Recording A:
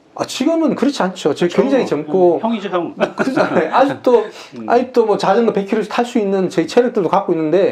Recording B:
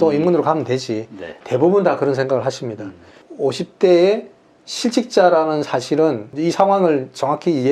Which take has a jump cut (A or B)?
B